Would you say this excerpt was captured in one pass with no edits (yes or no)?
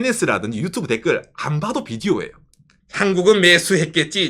yes